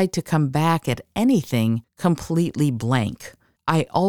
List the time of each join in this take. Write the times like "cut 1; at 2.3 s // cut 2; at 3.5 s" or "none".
cut 1; at 1.9 s